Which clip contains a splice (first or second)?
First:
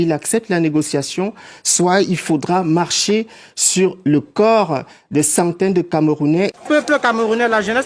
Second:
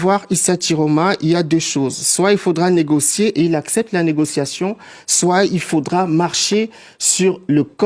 first